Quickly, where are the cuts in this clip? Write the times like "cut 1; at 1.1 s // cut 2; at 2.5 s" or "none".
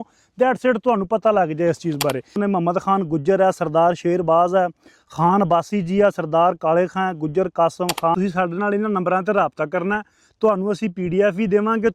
cut 1; at 2.3 s // cut 2; at 8.2 s